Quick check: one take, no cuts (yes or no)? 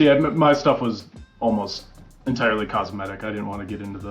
yes